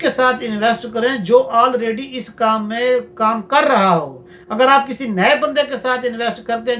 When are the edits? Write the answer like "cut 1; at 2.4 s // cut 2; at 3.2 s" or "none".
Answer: none